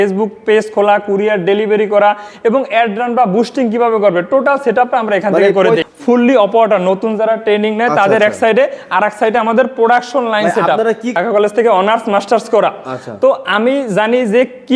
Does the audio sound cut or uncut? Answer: cut